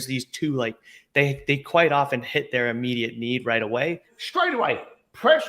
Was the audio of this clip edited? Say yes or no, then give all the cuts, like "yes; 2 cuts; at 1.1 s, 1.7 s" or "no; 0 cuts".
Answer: yes; 1 cut; at 4.1 s